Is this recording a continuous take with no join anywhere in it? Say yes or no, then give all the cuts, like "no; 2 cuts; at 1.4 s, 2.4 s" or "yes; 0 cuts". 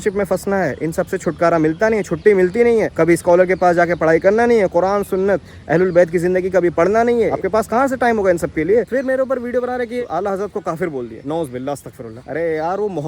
no; 1 cut; at 8.9 s